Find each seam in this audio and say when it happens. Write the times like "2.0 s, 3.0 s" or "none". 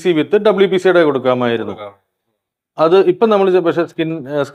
none